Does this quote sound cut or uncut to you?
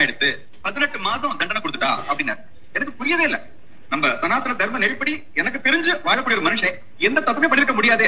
uncut